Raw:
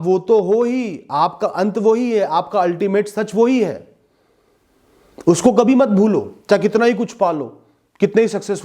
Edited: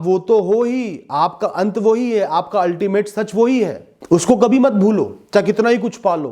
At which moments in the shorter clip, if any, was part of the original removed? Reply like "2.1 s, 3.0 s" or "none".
3.9 s